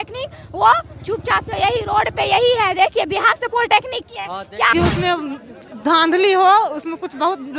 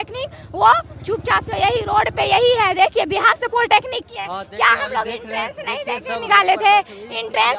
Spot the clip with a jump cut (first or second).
first